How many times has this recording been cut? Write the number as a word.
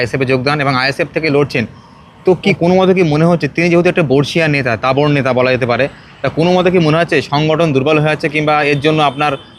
one